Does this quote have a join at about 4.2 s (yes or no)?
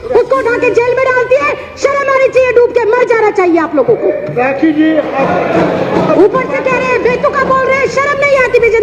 no